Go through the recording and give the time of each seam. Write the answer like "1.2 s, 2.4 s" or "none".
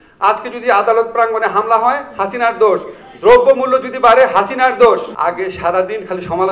5.1 s